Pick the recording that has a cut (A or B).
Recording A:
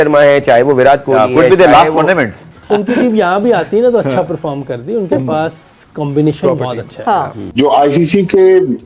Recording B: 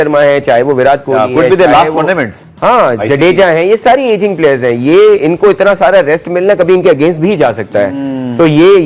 A